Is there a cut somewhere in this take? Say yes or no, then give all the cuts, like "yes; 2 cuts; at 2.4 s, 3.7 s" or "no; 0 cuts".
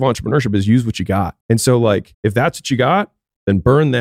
yes; 2 cuts; at 1.4 s, 2.1 s